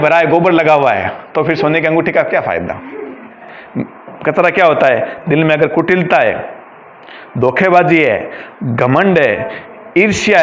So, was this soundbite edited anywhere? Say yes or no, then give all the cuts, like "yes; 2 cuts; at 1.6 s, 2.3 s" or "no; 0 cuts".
yes; 1 cut; at 3.5 s